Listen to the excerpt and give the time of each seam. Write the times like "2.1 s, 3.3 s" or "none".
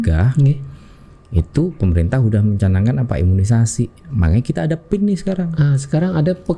none